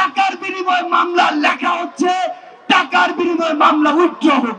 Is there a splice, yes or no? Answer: no